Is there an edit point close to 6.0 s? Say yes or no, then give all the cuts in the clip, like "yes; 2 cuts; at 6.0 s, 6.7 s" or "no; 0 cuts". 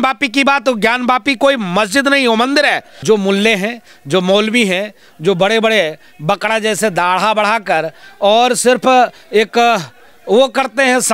no; 1 cut; at 2.9 s